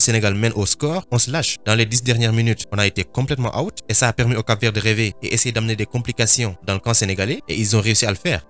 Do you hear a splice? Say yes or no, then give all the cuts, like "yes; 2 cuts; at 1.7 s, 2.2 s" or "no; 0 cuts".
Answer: no; 0 cuts